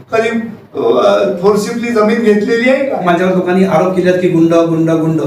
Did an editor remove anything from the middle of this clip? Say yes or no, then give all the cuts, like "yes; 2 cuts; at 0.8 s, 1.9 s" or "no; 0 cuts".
yes; 1 cut; at 3.1 s